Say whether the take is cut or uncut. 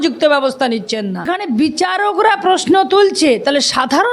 cut